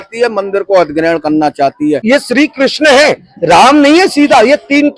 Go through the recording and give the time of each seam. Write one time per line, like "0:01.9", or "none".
0:02.0